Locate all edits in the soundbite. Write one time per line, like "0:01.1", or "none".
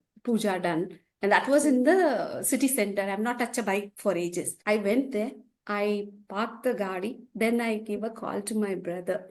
0:04.5